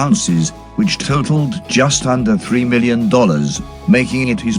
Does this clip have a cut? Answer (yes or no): yes